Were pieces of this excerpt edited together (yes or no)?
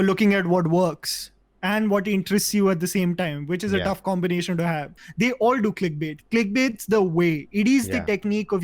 yes